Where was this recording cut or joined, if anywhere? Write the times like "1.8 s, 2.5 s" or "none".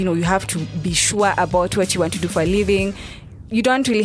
none